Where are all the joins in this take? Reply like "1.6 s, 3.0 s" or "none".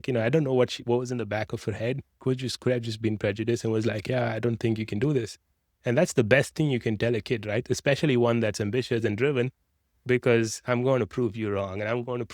none